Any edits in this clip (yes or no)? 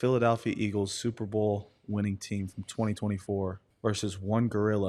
yes